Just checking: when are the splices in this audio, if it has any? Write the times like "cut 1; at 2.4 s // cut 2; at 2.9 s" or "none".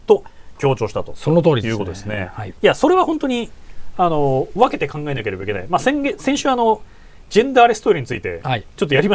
none